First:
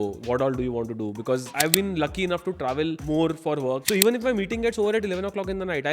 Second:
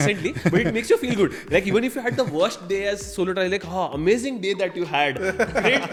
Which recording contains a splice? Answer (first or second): first